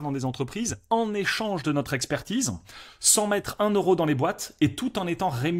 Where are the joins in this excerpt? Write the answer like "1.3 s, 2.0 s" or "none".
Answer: none